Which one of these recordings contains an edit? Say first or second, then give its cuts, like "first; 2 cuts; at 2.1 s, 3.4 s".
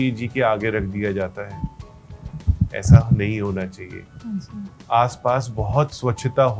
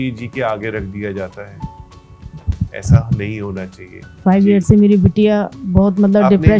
second; 1 cut; at 4.2 s